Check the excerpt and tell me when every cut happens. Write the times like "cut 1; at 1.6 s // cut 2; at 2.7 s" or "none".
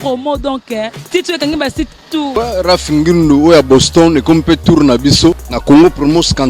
cut 1; at 2.3 s // cut 2; at 5.5 s

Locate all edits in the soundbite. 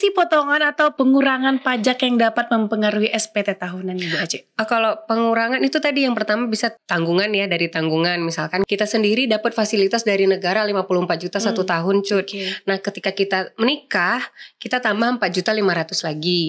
cut 1; at 0.9 s // cut 2; at 6.8 s // cut 3; at 8.7 s

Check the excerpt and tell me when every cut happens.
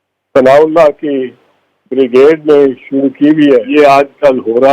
cut 1; at 3.7 s

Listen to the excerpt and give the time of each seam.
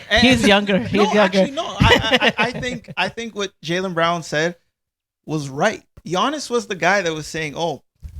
cut 1; at 5.9 s

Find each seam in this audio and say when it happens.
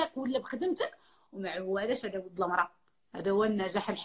none

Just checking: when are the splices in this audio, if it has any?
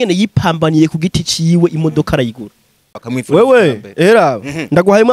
cut 1; at 3.0 s

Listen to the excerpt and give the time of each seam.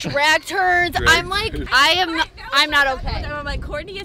cut 1; at 1.6 s

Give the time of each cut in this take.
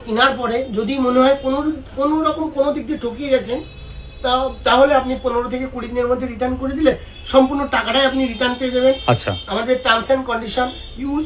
none

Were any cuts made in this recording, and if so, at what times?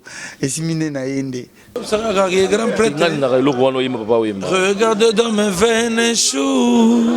cut 1; at 1.7 s

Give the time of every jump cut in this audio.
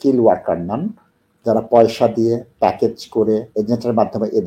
cut 1; at 3.5 s

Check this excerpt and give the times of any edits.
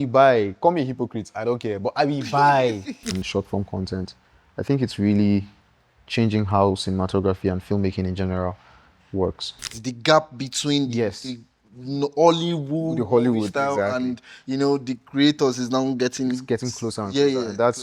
cut 1; at 3.2 s // cut 2; at 9.8 s

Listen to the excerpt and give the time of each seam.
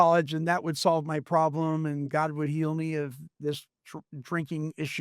none

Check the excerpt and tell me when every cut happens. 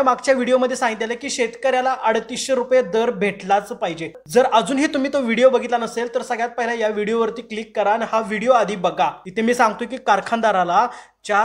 cut 1; at 4.2 s

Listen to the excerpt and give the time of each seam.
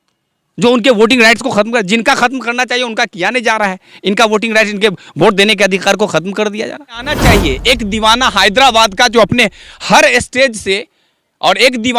cut 1; at 7.2 s

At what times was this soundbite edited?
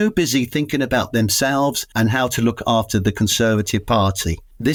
none

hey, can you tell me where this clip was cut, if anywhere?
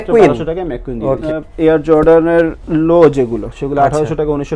none

